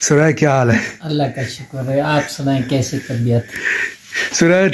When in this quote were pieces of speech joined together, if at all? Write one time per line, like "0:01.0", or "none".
none